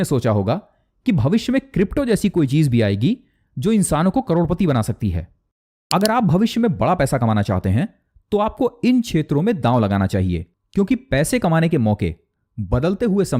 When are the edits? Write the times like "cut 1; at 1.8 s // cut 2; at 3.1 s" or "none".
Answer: cut 1; at 5.4 s